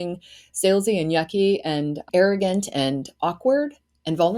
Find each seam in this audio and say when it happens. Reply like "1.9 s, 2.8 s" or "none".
2.0 s

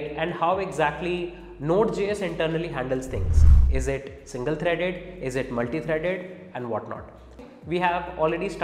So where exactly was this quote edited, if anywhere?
7.4 s

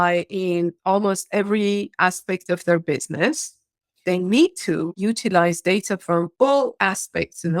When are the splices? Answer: 4.0 s

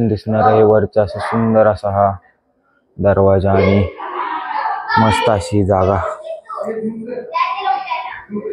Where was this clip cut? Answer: none

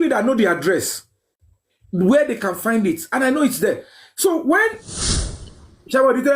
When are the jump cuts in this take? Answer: 5.3 s

